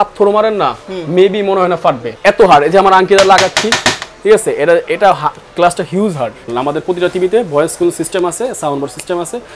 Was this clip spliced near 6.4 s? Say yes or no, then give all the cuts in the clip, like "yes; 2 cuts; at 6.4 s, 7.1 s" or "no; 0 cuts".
yes; 2 cuts; at 2.1 s, 6.4 s